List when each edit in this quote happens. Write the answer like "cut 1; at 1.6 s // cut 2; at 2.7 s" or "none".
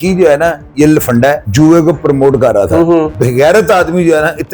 cut 1; at 1.5 s // cut 2; at 3.1 s